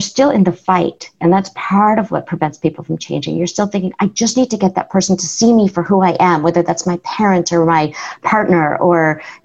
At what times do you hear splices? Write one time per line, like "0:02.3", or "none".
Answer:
0:05.3